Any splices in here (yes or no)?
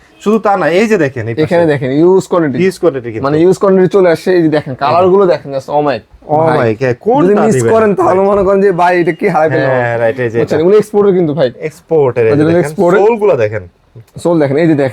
no